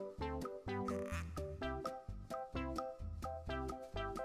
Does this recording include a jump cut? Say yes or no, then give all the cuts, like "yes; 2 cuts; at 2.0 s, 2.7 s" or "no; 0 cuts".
no; 0 cuts